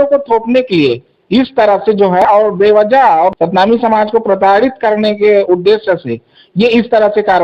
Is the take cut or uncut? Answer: cut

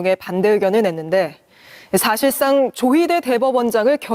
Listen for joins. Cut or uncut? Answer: uncut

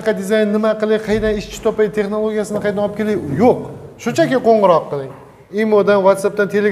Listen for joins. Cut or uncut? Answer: uncut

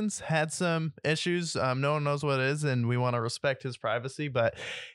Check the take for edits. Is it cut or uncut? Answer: uncut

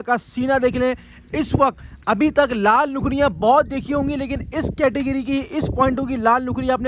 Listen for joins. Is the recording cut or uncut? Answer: uncut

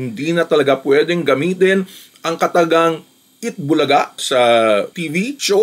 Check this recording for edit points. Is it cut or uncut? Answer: uncut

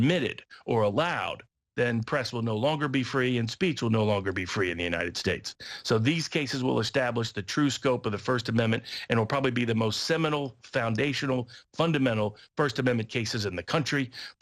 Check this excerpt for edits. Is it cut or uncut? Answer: cut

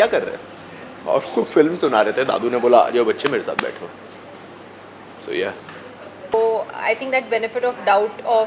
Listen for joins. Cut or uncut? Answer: cut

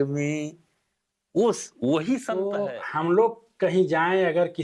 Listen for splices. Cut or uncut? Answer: cut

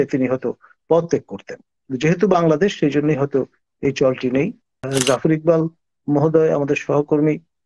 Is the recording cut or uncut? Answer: cut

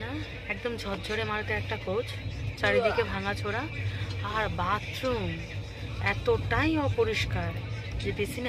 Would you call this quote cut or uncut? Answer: uncut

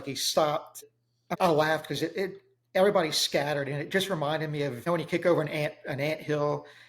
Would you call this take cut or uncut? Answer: cut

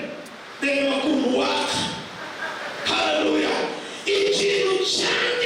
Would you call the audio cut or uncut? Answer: uncut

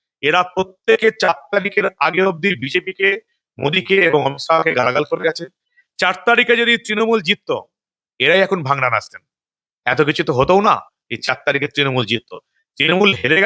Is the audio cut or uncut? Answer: uncut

